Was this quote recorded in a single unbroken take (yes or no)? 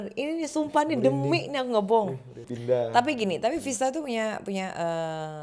no